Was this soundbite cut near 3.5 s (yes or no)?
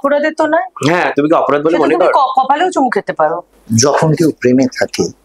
yes